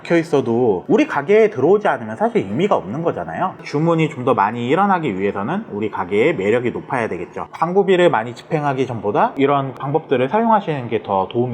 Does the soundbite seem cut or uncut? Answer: cut